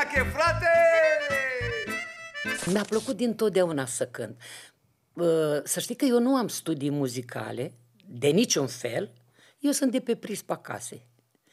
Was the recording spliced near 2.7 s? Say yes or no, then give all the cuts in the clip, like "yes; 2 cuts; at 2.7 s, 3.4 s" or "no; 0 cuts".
yes; 1 cut; at 2.7 s